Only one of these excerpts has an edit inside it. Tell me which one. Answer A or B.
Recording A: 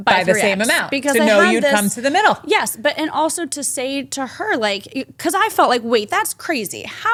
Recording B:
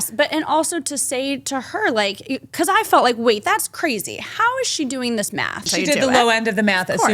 B